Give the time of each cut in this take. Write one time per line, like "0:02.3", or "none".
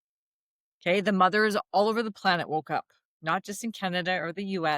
none